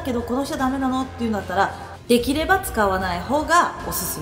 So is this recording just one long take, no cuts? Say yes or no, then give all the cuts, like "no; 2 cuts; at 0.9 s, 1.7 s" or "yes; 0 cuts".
yes; 0 cuts